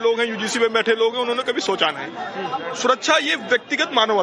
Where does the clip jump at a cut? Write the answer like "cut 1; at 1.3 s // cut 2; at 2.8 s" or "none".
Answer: cut 1; at 1.0 s